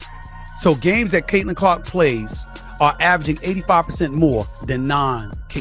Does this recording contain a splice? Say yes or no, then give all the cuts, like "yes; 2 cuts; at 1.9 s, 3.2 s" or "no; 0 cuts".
no; 0 cuts